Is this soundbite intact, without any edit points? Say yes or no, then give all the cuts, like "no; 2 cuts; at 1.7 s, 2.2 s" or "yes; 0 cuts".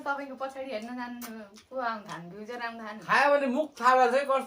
no; 1 cut; at 3.0 s